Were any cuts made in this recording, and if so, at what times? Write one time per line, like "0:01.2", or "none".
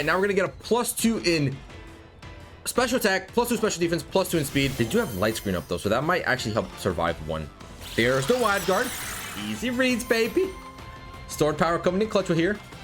0:04.7

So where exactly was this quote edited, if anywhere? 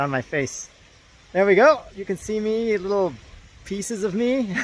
none

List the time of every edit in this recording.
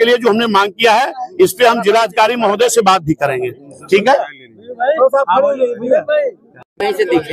none

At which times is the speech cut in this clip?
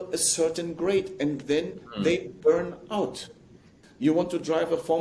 0:03.8

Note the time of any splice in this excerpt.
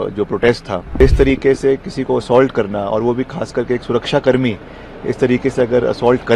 0:01.0

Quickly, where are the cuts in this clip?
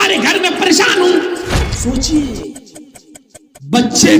0:01.7

